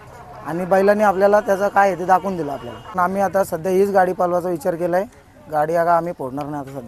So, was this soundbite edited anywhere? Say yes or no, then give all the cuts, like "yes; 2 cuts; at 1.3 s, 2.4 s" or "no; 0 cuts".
yes; 1 cut; at 2.9 s